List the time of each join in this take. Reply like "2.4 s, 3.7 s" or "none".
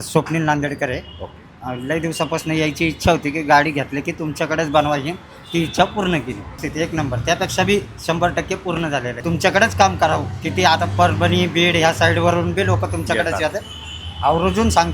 6.6 s, 9.2 s